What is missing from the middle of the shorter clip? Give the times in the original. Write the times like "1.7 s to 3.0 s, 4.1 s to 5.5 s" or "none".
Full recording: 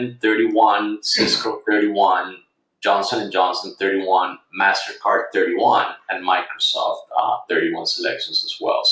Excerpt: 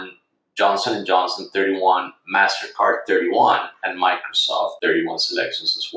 7.0 s to 7.4 s